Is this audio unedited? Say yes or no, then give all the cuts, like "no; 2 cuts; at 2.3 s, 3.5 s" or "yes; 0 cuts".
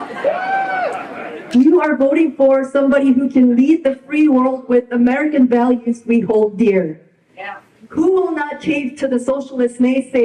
yes; 0 cuts